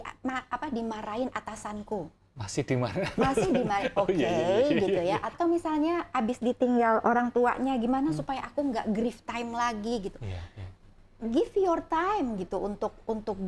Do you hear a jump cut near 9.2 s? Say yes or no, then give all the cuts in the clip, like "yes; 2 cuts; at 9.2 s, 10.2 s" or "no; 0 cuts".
no; 1 cut; at 5.3 s